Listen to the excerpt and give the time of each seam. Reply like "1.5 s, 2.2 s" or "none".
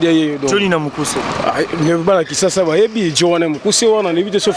none